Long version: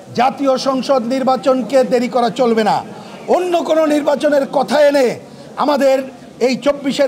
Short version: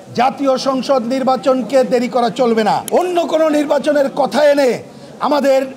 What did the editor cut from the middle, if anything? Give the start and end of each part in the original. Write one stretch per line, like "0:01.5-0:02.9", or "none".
0:02.8-0:03.2